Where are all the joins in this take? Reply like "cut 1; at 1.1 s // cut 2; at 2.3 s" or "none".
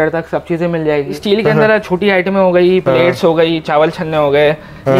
cut 1; at 1.2 s